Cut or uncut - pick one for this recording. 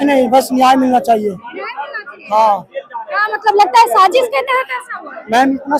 uncut